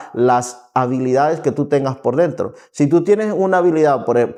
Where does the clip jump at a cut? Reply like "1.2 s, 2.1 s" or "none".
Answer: none